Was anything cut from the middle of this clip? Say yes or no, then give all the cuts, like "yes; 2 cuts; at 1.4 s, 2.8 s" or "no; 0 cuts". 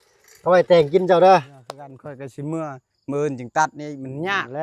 yes; 1 cut; at 2.0 s